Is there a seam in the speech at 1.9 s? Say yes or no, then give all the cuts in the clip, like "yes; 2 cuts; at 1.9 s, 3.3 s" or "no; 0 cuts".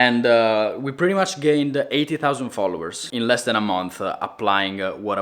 no; 0 cuts